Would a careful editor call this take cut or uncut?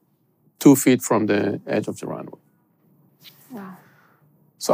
uncut